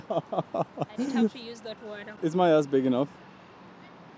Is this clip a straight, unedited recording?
no; 1 cut; at 2.2 s

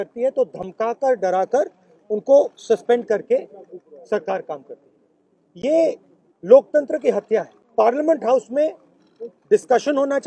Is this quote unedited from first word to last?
no; 1 cut; at 7.6 s

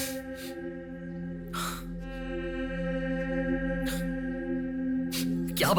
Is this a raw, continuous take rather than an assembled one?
yes; 0 cuts

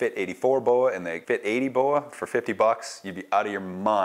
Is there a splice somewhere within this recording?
yes; 1 cut; at 1.1 s

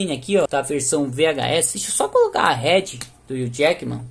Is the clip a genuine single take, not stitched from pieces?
yes; 0 cuts

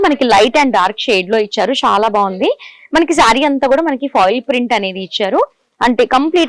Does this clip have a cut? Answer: no; 0 cuts

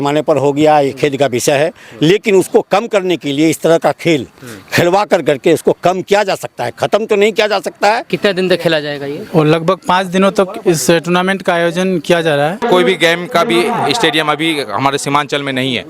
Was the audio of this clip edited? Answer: yes; 2 cuts; at 8.1 s, 12.6 s

